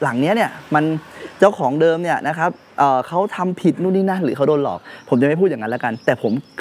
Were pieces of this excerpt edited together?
no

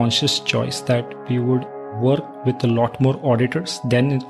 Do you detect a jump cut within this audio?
yes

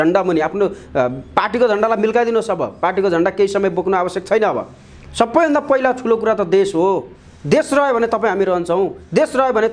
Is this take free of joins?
yes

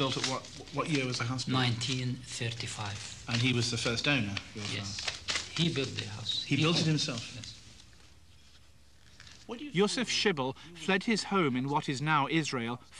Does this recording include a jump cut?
no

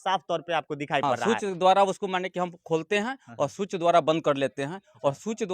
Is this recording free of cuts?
no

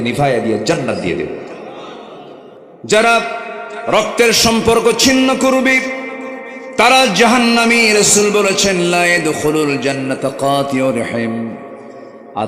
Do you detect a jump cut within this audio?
yes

